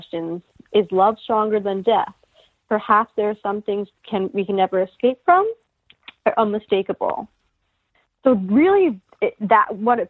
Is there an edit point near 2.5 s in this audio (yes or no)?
no